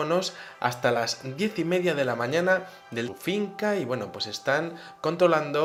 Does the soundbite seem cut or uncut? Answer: uncut